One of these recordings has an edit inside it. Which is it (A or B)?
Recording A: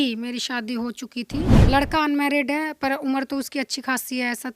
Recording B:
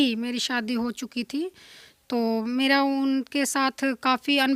A